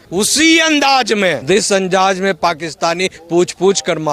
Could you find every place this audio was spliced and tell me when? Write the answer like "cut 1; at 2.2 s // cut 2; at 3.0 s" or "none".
cut 1; at 1.4 s